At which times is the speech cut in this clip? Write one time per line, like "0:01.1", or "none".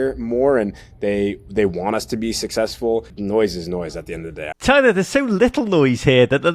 0:03.1
0:04.5